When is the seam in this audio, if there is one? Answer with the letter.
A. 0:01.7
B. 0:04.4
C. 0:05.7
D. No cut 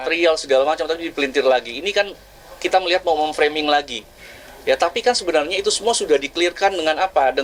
D